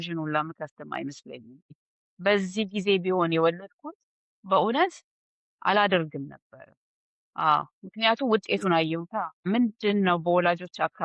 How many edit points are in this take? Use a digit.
2